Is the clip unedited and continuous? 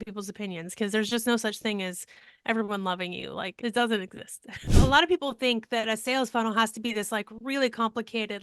no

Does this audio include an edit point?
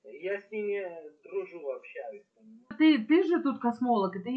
yes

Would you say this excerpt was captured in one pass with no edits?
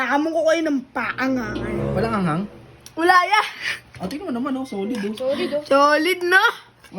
no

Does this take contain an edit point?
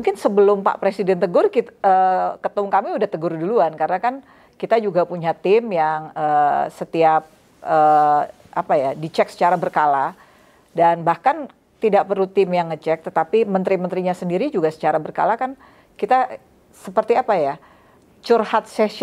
no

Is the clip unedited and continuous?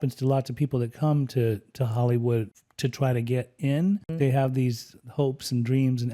no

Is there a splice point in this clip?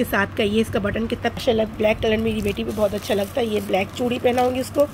yes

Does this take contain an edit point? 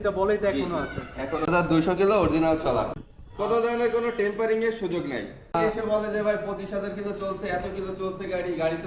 yes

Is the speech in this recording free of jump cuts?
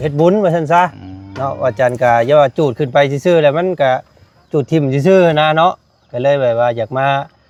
yes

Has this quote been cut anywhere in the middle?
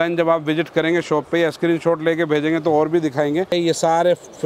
yes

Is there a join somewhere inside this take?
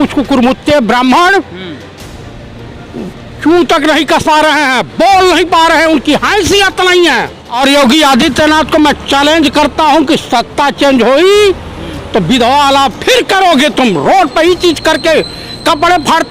yes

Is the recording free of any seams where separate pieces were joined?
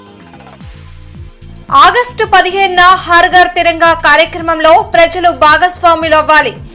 no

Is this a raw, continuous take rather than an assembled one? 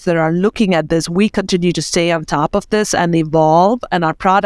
yes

